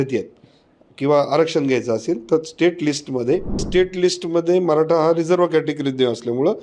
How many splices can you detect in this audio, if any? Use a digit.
1